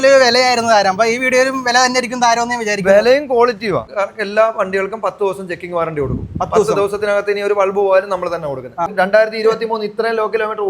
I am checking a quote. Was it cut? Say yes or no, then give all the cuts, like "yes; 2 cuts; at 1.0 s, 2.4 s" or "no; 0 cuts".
yes; 2 cuts; at 3.9 s, 8.9 s